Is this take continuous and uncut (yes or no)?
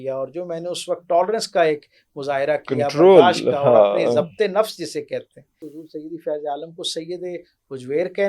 no